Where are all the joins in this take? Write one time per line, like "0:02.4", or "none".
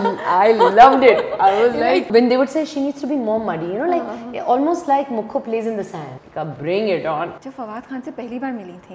0:02.1
0:06.2
0:07.4